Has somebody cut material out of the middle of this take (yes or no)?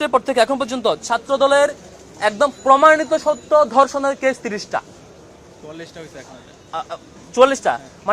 no